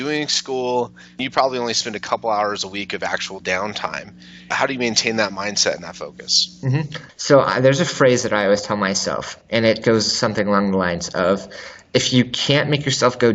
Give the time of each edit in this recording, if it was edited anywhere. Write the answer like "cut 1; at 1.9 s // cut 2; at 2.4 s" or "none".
cut 1; at 1.1 s // cut 2; at 4.6 s // cut 3; at 7.0 s

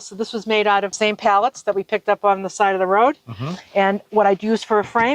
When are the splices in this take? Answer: cut 1; at 0.9 s

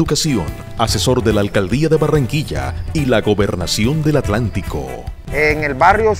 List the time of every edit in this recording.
none

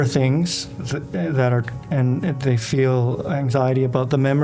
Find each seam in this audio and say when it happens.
none

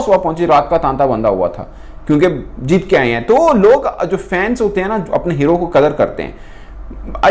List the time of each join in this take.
none

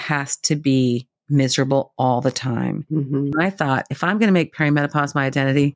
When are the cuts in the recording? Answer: cut 1; at 2.8 s

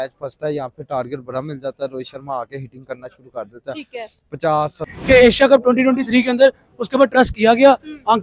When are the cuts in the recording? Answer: cut 1; at 4.9 s

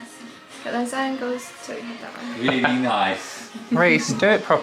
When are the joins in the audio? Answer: none

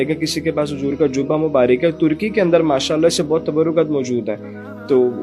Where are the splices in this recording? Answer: none

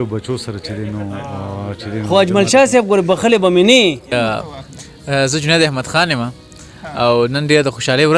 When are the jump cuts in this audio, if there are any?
cut 1; at 4.1 s

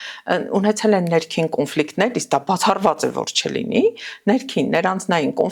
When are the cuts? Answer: none

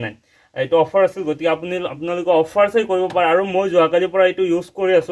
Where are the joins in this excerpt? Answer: none

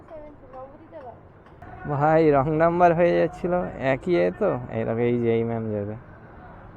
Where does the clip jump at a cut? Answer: cut 1; at 1.6 s

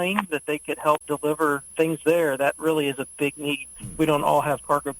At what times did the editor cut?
cut 1; at 3.7 s

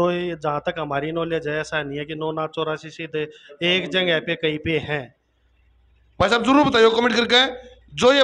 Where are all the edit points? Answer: none

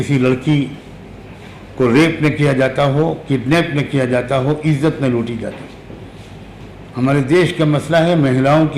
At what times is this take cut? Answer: none

